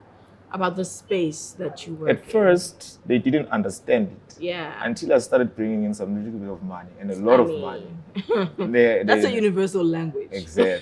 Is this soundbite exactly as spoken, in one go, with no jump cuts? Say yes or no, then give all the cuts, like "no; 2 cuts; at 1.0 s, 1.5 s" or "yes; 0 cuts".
yes; 0 cuts